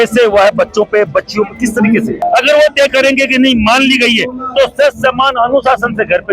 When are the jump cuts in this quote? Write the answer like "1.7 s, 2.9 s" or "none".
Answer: 2.2 s